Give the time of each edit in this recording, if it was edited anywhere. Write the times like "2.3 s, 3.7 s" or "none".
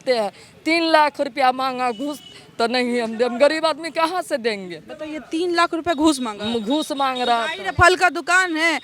none